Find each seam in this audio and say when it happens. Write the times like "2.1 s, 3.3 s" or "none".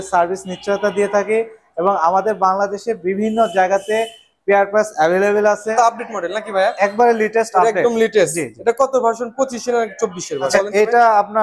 5.7 s, 10.5 s